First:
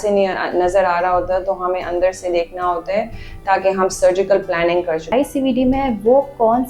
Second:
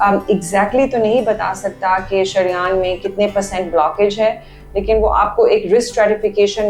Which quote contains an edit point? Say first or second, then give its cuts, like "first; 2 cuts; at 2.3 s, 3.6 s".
first; 1 cut; at 5.1 s